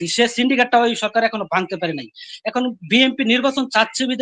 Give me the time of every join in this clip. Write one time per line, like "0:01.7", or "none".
none